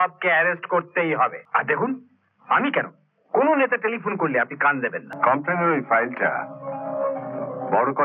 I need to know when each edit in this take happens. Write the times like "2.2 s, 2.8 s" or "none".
1.4 s, 5.1 s